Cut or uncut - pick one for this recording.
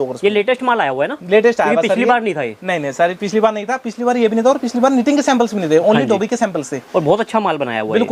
uncut